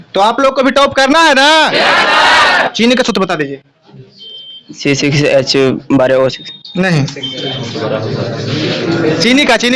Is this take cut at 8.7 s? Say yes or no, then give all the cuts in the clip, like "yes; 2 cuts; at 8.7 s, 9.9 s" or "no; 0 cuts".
no; 1 cut; at 2.7 s